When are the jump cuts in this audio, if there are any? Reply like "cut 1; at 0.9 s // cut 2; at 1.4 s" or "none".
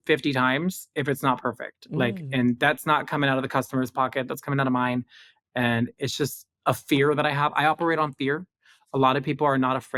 none